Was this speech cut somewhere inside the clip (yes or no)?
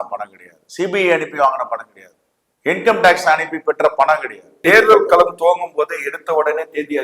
yes